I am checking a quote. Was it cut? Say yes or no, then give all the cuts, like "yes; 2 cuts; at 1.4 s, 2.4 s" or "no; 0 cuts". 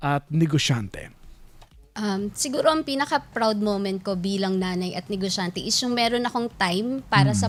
no; 0 cuts